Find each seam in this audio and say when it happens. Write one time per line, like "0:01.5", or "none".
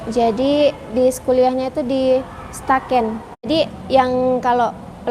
0:03.5